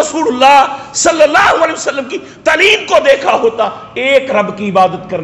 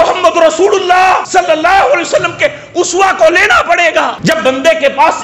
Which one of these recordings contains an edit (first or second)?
second